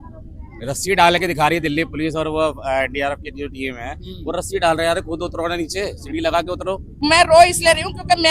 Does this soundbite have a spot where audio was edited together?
yes; 1 cut; at 6.9 s

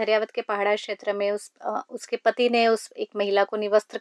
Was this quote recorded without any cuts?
yes; 0 cuts

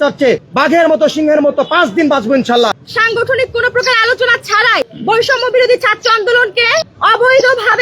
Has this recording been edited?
yes; 2 cuts; at 2.8 s, 4.9 s

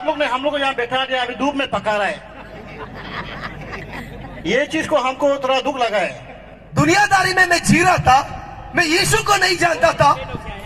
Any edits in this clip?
yes; 1 cut; at 6.7 s

